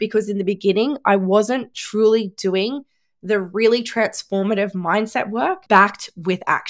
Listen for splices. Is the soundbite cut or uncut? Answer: cut